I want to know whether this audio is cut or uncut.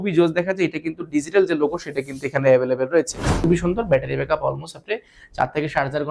cut